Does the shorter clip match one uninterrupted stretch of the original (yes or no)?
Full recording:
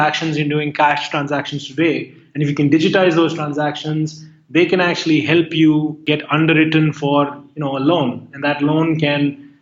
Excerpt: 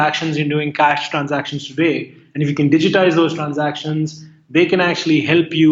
yes